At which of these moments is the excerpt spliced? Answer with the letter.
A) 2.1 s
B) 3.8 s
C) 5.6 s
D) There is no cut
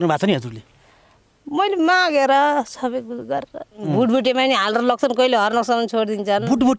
B